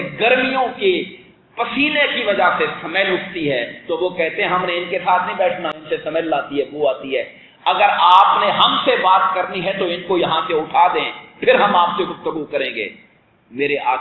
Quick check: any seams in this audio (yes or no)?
no